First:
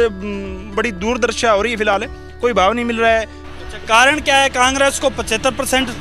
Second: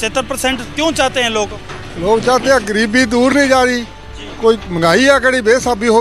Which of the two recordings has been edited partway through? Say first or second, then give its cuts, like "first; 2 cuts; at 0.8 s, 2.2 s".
first; 1 cut; at 3.4 s